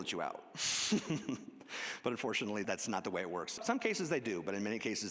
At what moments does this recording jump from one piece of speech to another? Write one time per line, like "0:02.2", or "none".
0:02.6
0:03.6